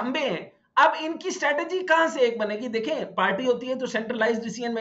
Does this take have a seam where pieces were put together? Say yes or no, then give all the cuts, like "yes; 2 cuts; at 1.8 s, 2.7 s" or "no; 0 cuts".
no; 0 cuts